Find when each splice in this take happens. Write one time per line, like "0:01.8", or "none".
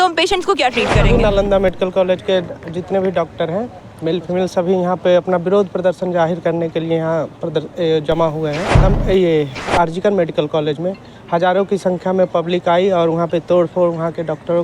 0:01.1
0:08.8